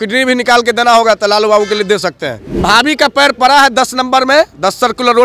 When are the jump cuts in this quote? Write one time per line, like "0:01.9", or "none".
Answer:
0:02.6